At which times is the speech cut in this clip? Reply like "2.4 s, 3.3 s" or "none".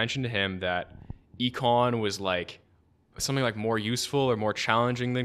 none